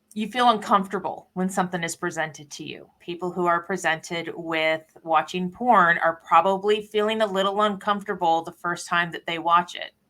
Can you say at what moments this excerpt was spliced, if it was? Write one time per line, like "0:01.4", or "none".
0:02.9

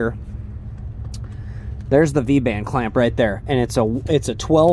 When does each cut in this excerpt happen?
none

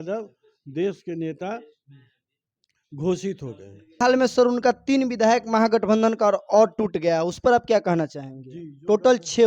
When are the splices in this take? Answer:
0:04.0

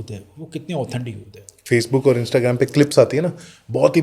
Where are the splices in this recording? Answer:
0:01.6

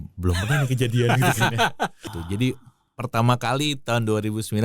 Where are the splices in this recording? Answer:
0:02.0

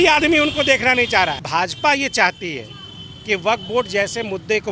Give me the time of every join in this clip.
0:01.4

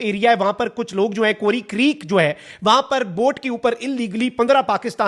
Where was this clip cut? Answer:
none

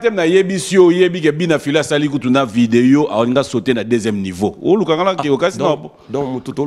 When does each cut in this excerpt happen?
none

